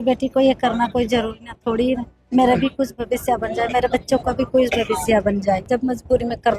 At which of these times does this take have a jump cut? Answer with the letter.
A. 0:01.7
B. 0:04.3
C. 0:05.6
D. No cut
C